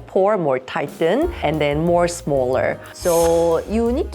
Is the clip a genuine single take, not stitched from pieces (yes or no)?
no